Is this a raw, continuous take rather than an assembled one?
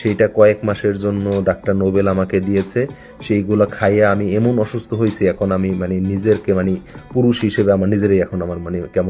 yes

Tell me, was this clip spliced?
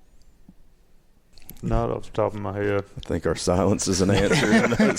yes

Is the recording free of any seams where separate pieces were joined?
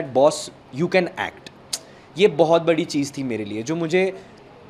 yes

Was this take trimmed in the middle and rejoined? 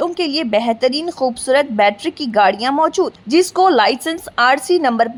no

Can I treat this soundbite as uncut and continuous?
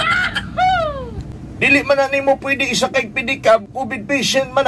no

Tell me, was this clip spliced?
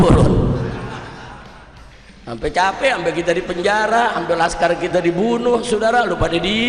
no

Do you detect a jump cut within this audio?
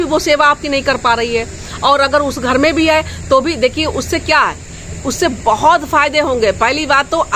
no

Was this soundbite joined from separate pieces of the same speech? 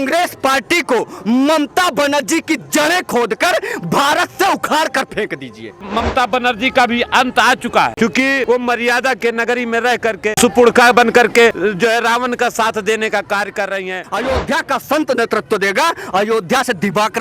yes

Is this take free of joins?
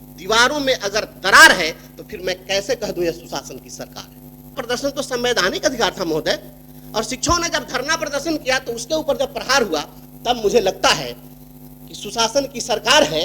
no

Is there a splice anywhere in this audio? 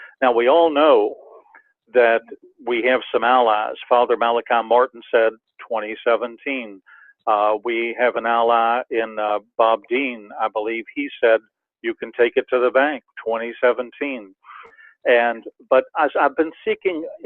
yes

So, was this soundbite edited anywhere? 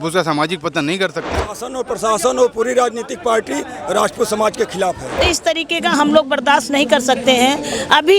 yes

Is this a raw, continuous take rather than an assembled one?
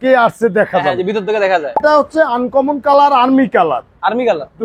no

